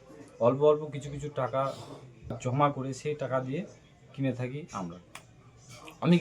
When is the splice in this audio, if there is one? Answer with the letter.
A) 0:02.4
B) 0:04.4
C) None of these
A